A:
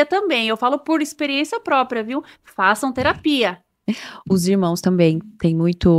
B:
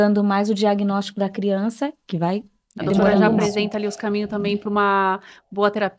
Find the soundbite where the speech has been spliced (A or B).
B